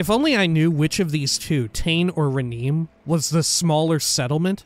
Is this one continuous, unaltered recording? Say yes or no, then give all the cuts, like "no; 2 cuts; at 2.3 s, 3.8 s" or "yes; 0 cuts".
yes; 0 cuts